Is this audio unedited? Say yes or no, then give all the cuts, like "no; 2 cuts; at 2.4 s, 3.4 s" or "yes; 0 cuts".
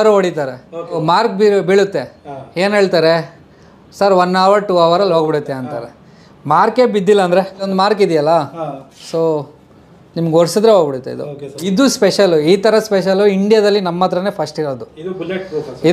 no; 3 cuts; at 1.0 s, 7.6 s, 11.7 s